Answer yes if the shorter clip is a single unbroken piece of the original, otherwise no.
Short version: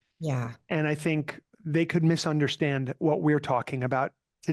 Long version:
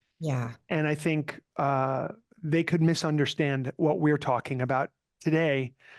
no